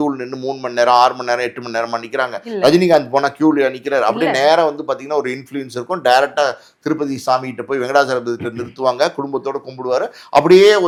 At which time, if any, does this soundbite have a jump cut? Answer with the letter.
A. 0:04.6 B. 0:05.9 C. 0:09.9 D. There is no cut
D